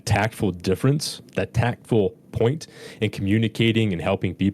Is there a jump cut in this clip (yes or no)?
no